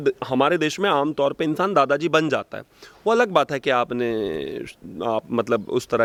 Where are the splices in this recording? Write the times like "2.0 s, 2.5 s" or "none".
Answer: none